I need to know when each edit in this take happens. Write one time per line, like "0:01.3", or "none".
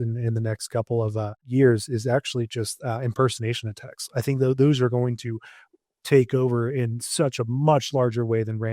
0:01.4